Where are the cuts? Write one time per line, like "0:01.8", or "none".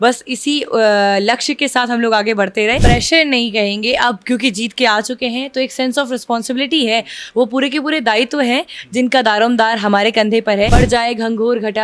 0:02.8
0:10.7